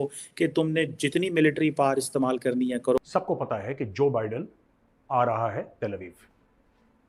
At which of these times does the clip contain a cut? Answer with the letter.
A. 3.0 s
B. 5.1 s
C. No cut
A